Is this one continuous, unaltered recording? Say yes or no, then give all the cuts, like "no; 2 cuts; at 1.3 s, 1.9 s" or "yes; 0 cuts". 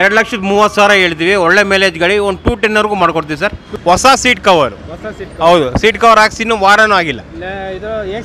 no; 1 cut; at 3.7 s